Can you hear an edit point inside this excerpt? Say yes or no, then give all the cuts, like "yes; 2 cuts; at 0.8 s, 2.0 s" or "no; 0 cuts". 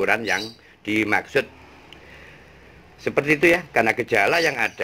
yes; 1 cut; at 3.7 s